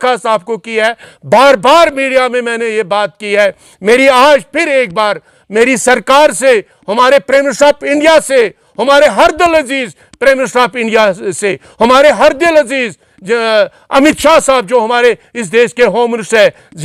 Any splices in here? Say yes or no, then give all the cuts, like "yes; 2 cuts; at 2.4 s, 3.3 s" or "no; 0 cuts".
no; 0 cuts